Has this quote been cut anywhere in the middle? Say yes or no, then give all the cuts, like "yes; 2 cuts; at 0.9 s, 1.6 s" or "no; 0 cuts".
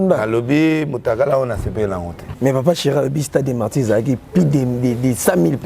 yes; 1 cut; at 2.3 s